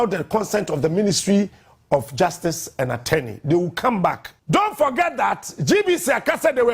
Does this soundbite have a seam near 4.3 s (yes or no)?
yes